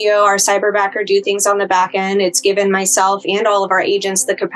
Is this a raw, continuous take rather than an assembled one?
yes; 0 cuts

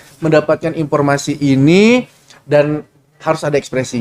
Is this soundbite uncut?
yes; 0 cuts

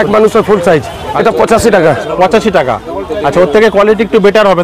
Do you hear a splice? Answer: yes; 1 cut; at 1.1 s

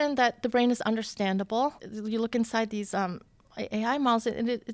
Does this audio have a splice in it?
yes; 1 cut; at 1.9 s

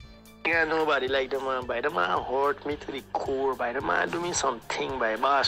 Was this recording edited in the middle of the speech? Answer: no; 0 cuts

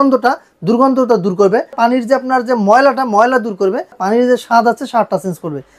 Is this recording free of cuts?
no; 2 cuts; at 1.7 s, 4.0 s

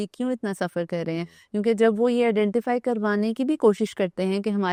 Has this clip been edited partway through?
no; 0 cuts

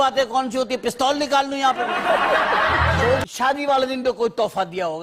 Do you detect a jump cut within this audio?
yes; 1 cut; at 3.2 s

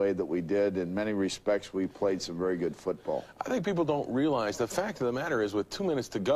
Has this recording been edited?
yes; 1 cut; at 3.1 s

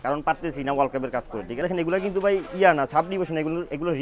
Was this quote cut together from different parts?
yes; 1 cut; at 1.6 s

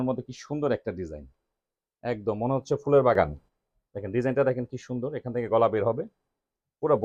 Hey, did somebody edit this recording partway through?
no; 0 cuts

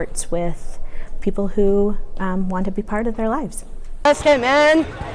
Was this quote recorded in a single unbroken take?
yes; 0 cuts

